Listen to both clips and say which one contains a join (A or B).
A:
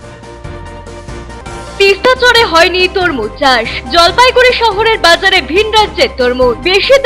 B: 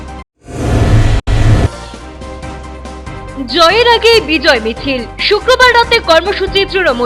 A